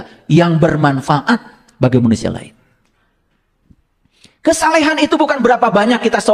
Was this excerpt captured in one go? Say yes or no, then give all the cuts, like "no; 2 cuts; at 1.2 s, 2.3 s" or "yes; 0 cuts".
yes; 0 cuts